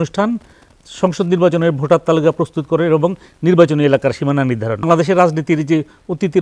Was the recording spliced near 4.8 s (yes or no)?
yes